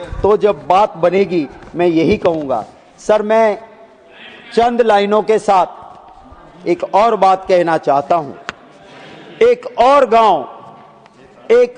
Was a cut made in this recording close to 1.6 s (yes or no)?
no